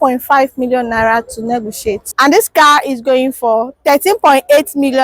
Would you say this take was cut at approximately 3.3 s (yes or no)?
no